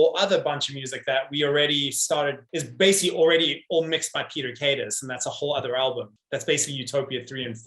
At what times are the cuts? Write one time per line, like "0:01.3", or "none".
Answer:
0:02.4
0:06.2